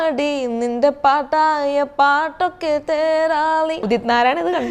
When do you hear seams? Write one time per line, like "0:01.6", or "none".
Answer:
0:03.8